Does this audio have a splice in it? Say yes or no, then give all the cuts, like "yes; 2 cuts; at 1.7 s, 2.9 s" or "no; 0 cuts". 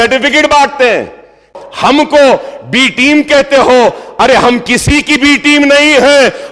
yes; 1 cut; at 1.5 s